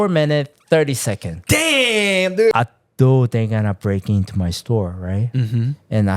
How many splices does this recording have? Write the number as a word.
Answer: one